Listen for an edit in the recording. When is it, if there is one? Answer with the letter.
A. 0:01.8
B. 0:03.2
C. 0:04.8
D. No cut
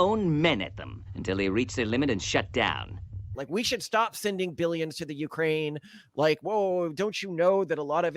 B